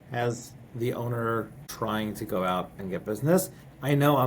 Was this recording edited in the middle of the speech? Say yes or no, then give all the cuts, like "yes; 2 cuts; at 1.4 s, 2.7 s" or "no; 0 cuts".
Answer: yes; 1 cut; at 1.7 s